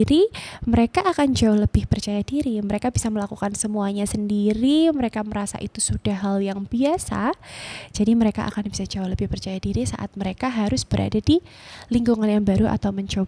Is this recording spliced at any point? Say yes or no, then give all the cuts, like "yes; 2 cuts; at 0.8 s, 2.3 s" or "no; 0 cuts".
no; 0 cuts